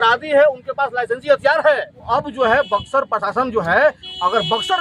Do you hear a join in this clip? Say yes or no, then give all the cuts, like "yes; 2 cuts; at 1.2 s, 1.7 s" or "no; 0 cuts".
yes; 1 cut; at 2.0 s